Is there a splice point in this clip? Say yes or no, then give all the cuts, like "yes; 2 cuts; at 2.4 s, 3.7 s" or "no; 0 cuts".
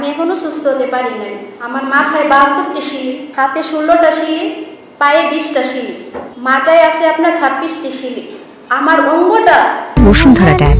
no; 0 cuts